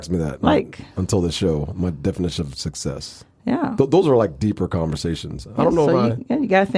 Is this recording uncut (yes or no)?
yes